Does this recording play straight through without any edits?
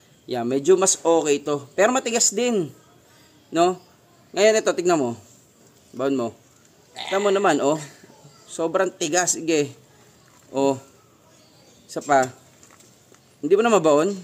yes; 0 cuts

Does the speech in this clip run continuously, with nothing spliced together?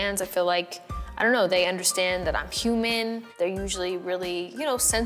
no; 1 cut; at 3.3 s

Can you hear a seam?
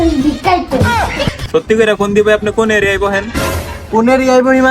yes; 1 cut; at 1.4 s

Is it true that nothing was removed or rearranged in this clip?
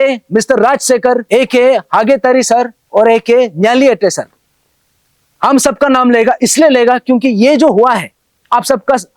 no; 1 cut; at 1.2 s

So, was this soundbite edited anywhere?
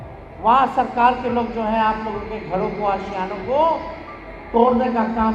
no; 0 cuts

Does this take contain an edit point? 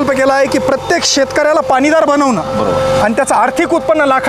no; 0 cuts

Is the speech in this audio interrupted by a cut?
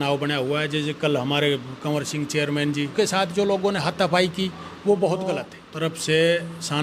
yes; 2 cuts; at 2.9 s, 5.6 s

